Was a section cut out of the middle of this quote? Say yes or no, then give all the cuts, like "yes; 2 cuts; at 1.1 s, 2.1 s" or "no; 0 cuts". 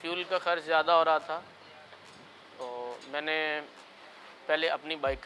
no; 0 cuts